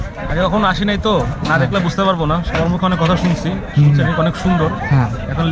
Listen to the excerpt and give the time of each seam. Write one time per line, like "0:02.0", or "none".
none